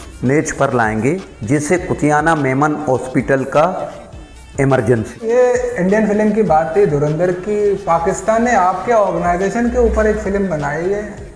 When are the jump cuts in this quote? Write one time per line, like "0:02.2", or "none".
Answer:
0:01.3
0:05.6